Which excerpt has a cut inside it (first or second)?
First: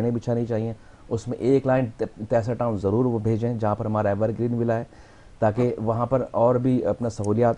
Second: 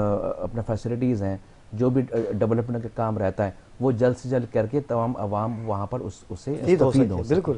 second